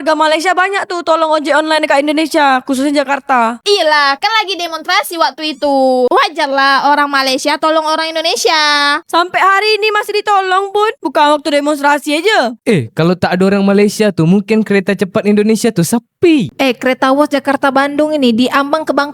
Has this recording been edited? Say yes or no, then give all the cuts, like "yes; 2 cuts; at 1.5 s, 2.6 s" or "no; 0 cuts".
no; 0 cuts